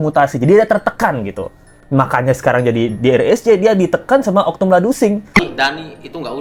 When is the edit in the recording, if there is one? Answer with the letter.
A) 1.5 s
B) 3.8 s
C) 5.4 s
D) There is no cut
C